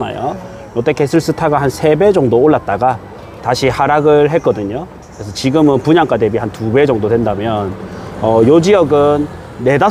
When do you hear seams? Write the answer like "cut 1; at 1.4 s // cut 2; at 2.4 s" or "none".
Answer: none

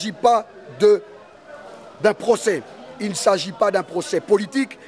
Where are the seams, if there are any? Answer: none

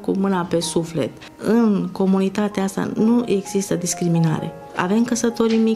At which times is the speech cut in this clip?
cut 1; at 1.2 s // cut 2; at 4.6 s

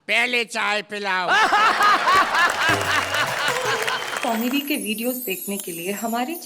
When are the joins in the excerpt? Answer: cut 1; at 4.1 s

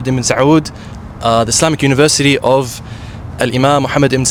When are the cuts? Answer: none

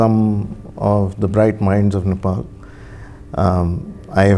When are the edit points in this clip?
none

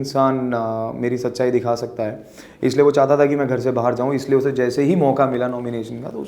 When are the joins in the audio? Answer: none

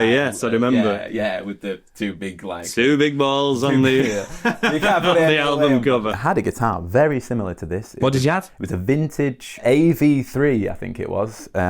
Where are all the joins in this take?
cut 1; at 6.1 s // cut 2; at 9.6 s

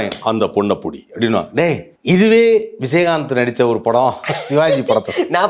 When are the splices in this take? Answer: cut 1; at 1.9 s

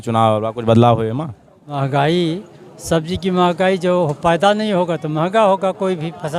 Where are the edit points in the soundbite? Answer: cut 1; at 1.8 s

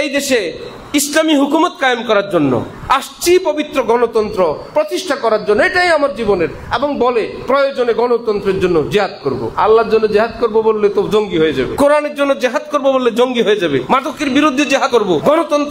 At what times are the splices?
cut 1; at 9.5 s // cut 2; at 11.7 s // cut 3; at 13.8 s // cut 4; at 15.0 s

